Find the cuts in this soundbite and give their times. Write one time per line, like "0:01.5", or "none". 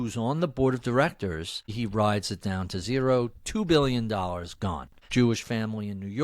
0:01.7
0:05.0